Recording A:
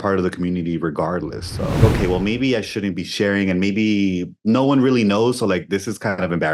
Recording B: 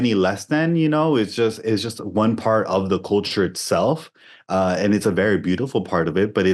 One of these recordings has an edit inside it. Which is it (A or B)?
A